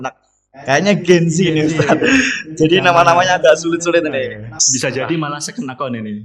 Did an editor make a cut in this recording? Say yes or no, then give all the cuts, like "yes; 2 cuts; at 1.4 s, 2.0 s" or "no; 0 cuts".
yes; 1 cut; at 4.5 s